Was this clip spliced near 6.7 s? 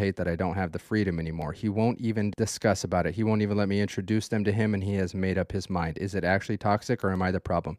no; 1 cut; at 2.3 s

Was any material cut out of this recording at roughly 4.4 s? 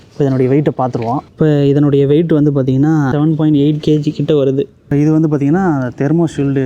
no; 1 cut; at 3.1 s

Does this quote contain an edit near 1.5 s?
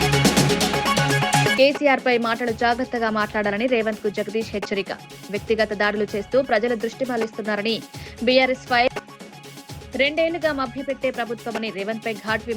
yes; 1 cut; at 1.5 s

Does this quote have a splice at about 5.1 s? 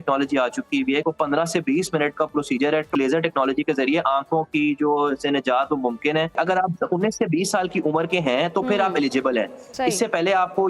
no; 3 cuts; at 1.0 s, 2.9 s, 6.3 s

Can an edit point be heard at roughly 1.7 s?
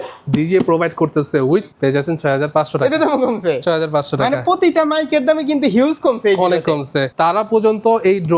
yes; 2 cuts; at 1.7 s, 7.1 s

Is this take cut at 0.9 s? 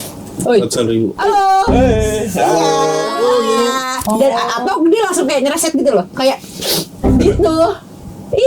no; 1 cut; at 4.0 s

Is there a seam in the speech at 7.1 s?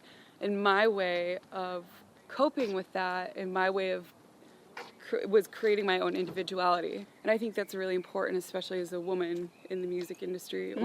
yes; 1 cut; at 7.1 s

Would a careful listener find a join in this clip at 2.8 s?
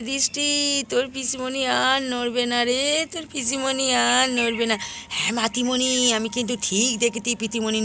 no; 0 cuts

